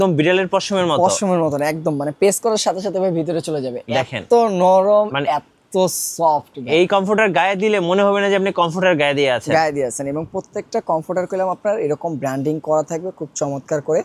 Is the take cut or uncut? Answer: uncut